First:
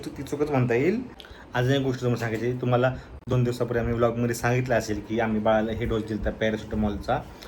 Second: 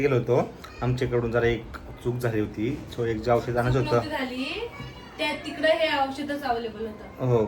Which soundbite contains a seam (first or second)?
first